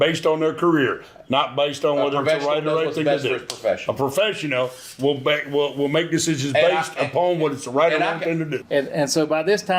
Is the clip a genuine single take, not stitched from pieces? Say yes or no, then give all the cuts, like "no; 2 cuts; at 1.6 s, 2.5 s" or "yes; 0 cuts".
no; 1 cut; at 8.6 s